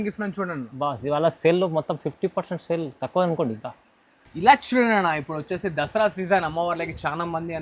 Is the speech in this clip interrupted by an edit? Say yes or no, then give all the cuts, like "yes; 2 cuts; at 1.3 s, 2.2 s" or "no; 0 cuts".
no; 0 cuts